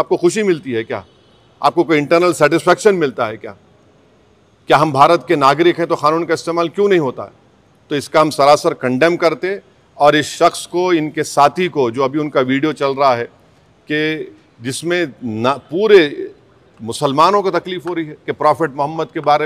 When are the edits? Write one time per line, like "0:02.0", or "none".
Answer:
none